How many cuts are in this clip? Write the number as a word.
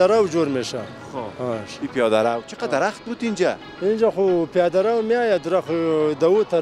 zero